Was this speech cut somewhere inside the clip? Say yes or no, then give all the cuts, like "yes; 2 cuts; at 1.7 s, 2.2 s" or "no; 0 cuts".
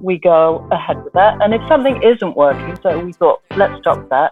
yes; 1 cut; at 2.8 s